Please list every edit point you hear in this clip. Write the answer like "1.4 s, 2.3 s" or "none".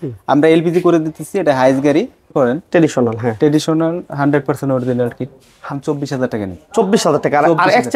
2.3 s, 5.7 s